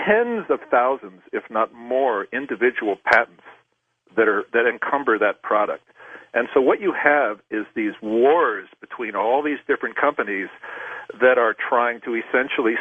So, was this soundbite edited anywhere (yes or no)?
yes